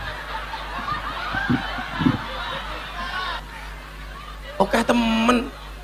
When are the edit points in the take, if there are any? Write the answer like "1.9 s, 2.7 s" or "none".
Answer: 3.4 s